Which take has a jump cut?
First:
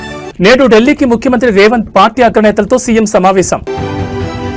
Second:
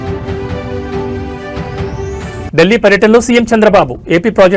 second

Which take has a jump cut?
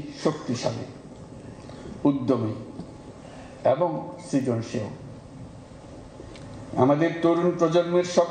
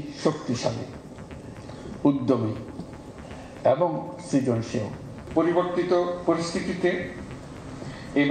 second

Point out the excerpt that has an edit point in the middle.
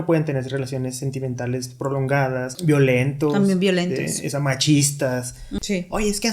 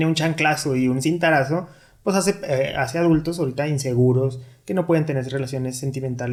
first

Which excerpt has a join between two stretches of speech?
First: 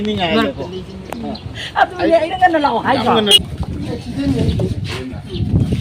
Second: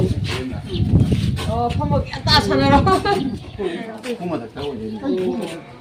first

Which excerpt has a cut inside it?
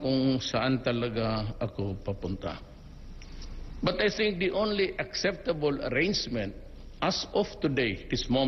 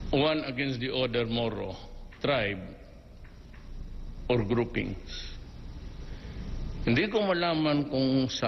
first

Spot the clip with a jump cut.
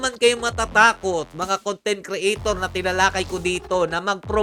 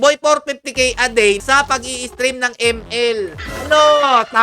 second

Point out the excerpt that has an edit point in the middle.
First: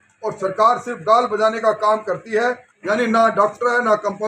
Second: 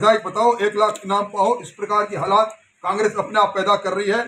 first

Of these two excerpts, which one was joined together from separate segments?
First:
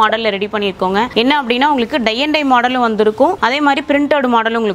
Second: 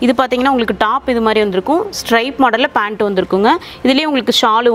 first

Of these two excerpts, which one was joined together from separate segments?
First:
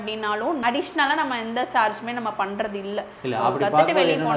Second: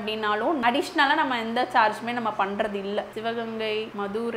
second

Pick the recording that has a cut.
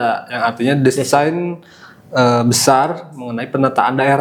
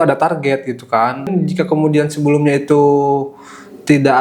second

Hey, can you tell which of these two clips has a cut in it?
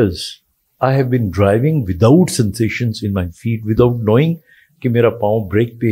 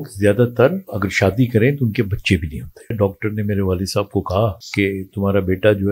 second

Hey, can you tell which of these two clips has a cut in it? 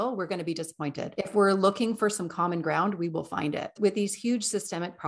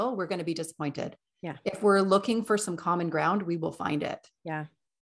first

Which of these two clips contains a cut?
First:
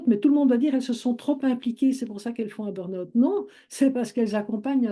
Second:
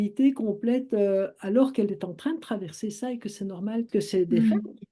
second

